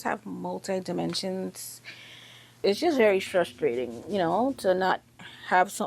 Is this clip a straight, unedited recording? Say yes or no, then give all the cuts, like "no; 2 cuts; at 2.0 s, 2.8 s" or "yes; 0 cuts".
no; 1 cut; at 2.5 s